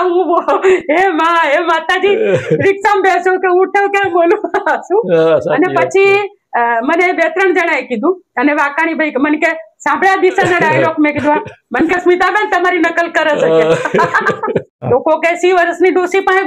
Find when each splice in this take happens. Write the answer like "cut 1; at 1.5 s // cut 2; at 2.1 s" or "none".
cut 1; at 14.7 s